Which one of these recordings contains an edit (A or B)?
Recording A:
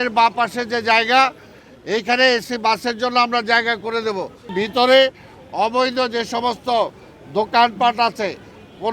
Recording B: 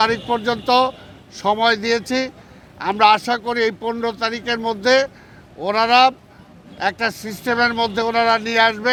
A